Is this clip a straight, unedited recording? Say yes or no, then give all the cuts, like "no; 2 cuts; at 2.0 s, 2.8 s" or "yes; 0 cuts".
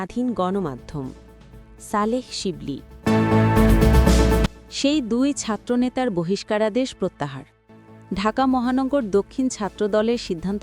no; 2 cuts; at 2.9 s, 4.5 s